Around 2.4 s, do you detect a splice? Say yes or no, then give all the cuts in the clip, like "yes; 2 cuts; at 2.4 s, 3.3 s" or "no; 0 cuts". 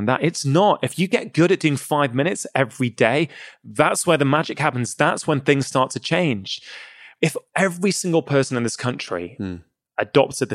no; 1 cut; at 7.1 s